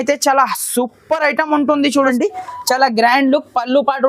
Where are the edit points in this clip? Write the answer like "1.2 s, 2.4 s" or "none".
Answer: 2.1 s